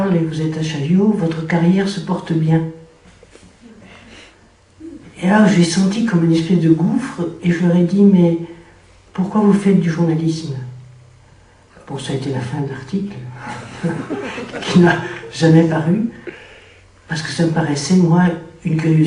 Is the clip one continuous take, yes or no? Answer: no